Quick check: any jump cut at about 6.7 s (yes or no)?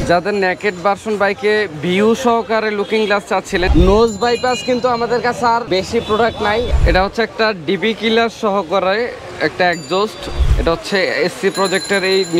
yes